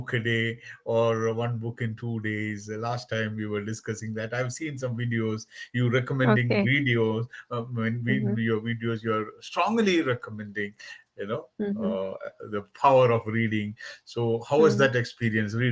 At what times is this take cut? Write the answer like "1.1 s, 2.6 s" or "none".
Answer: none